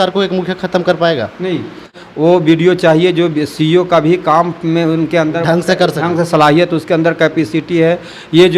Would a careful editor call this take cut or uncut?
cut